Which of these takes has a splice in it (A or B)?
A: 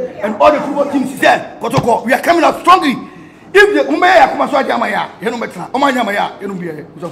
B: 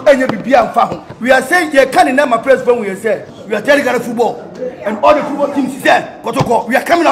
B